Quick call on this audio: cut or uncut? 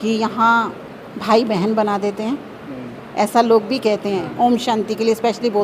uncut